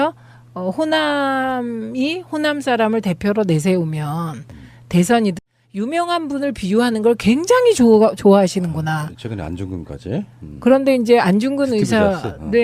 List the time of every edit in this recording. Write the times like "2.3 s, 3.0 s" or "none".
none